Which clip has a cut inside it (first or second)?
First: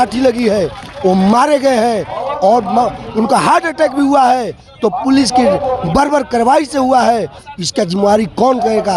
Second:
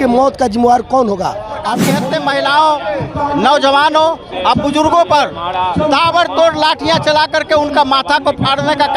second